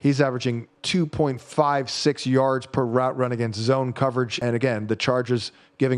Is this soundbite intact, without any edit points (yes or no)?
no